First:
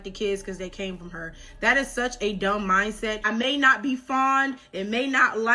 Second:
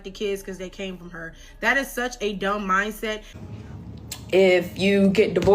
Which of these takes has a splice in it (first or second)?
second